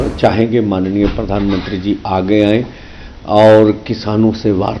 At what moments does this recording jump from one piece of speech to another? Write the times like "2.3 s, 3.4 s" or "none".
none